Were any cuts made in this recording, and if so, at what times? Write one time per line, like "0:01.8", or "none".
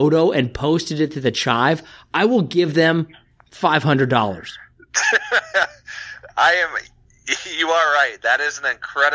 none